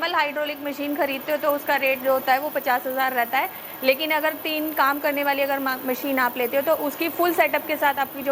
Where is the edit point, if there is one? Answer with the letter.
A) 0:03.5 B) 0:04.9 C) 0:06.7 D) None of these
D